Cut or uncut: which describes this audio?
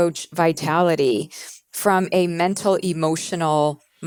uncut